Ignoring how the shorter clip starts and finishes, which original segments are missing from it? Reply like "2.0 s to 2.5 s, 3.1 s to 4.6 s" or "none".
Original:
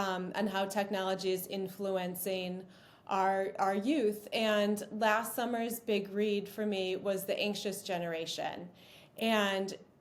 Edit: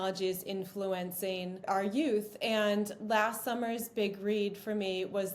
2.7 s to 3.5 s

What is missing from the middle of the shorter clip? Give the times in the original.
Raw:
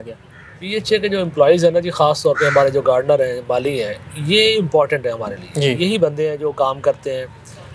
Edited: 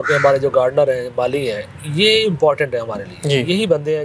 none

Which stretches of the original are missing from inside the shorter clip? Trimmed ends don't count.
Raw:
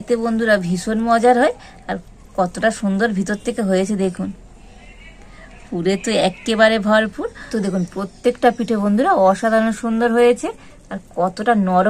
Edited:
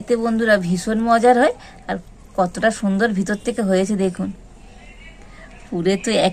none

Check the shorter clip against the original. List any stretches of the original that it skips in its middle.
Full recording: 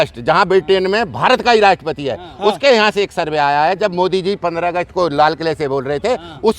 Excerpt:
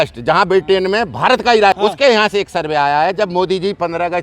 1.8 s to 2.4 s

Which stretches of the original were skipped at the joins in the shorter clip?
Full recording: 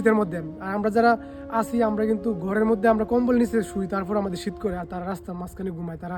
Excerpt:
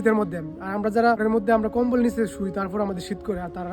1.2 s to 2.5 s

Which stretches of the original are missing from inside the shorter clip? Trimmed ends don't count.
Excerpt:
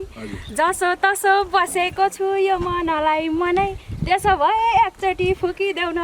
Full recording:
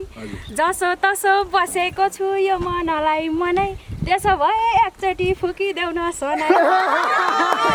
none

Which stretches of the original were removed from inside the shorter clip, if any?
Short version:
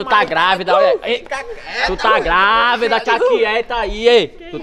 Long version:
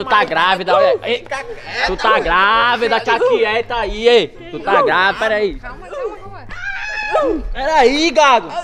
none

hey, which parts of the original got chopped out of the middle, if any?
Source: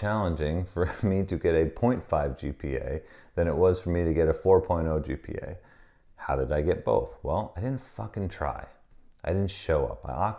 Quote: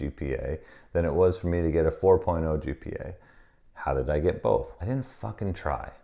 7.2 s to 7.5 s

